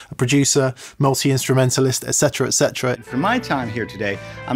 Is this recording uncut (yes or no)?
no